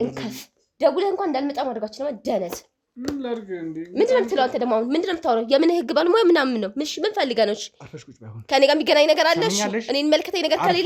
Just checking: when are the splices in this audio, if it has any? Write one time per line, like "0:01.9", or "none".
none